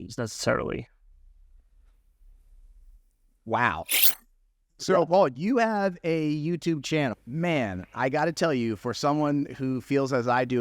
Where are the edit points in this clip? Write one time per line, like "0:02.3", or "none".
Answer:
0:04.0
0:07.2